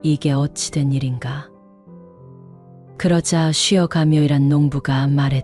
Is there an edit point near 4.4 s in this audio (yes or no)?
no